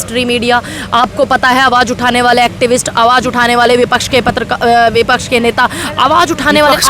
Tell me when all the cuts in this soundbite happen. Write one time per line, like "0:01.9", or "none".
none